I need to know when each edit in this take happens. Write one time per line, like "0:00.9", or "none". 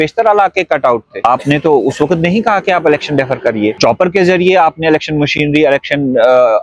0:01.1
0:03.8